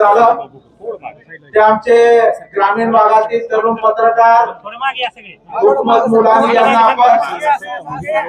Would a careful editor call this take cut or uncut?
uncut